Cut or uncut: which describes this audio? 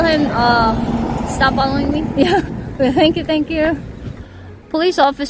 uncut